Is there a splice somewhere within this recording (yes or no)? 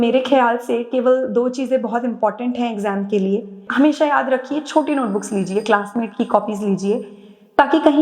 yes